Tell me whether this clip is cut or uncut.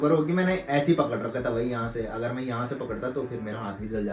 uncut